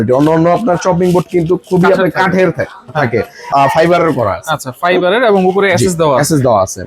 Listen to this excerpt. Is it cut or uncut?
cut